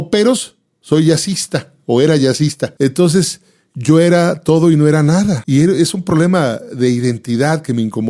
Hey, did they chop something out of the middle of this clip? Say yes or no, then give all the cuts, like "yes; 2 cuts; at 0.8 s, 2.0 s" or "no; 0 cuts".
yes; 2 cuts; at 2.7 s, 5.4 s